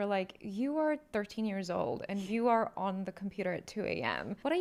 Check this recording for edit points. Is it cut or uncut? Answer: uncut